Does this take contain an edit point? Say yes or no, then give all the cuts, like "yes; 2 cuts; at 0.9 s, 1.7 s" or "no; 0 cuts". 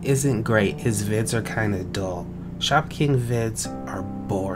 no; 0 cuts